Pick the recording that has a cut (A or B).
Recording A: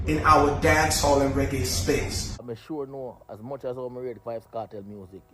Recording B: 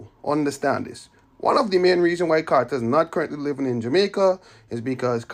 A